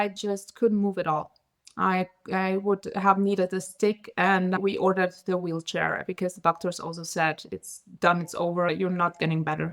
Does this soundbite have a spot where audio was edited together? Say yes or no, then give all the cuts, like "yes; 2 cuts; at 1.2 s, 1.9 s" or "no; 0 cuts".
yes; 2 cuts; at 4.6 s, 8.7 s